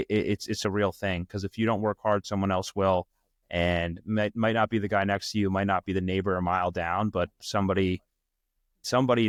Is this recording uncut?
yes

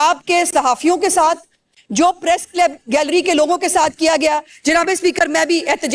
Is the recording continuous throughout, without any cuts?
yes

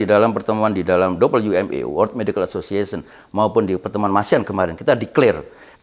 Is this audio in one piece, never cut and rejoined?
yes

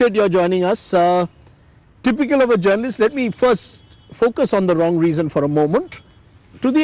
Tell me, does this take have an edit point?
yes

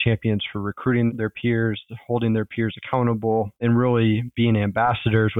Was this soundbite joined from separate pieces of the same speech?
no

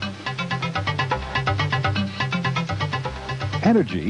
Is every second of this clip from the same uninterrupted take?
no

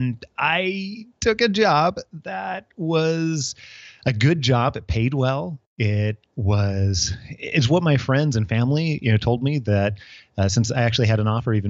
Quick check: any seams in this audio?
no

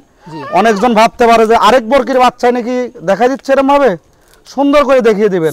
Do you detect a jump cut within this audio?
no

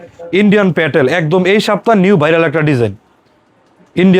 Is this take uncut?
yes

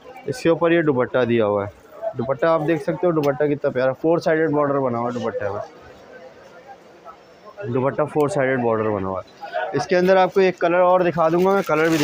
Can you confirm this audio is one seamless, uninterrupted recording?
yes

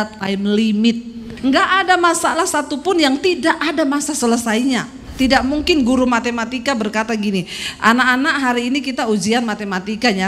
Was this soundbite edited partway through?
yes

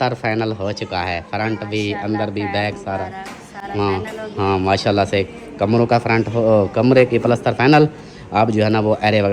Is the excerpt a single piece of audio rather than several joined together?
yes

